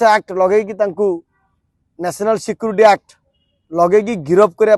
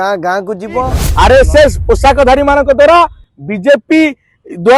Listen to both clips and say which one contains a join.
second; 1 cut; at 1.0 s

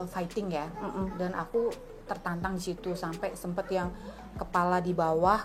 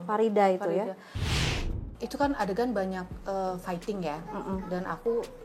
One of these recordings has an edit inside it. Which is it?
second; 1 cut; at 1.4 s

